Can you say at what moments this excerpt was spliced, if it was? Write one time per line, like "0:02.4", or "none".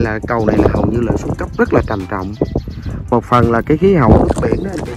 none